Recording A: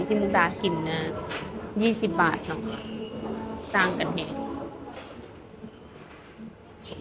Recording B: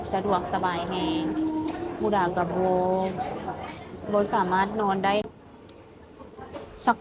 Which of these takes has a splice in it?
B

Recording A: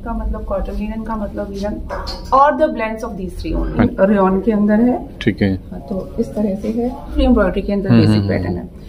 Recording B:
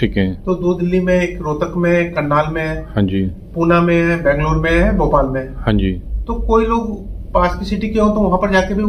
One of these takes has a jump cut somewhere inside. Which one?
A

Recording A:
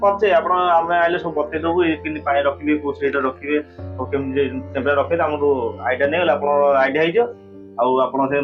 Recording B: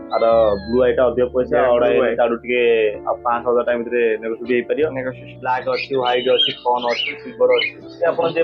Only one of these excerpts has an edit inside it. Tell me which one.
B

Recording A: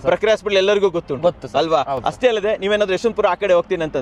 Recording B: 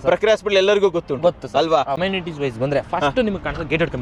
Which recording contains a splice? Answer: B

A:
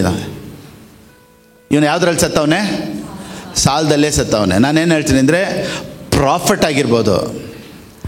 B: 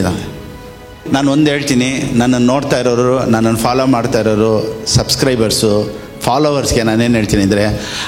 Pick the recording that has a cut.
B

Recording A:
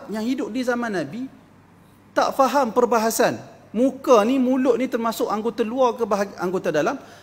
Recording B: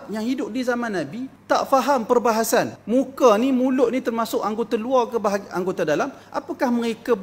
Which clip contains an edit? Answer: B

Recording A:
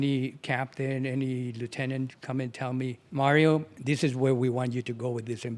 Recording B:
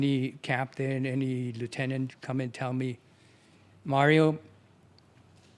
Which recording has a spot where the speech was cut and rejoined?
A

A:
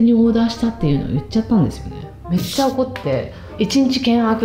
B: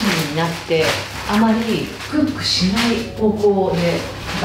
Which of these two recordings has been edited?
A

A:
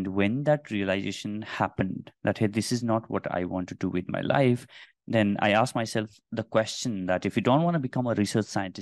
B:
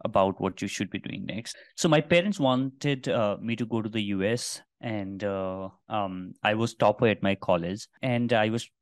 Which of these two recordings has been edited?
B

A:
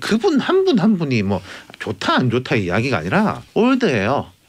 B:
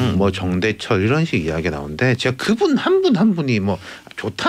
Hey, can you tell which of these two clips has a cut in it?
A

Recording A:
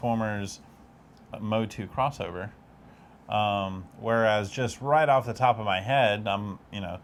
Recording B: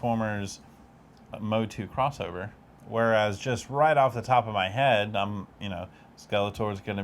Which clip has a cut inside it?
B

